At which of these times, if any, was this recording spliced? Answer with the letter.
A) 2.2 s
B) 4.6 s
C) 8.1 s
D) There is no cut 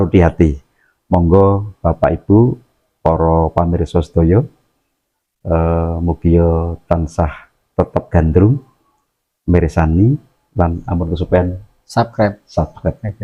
D